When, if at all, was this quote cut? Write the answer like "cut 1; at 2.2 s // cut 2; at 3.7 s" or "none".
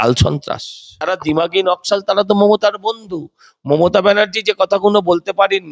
cut 1; at 1.1 s